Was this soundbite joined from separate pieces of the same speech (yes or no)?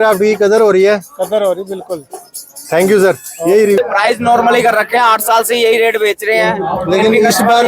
yes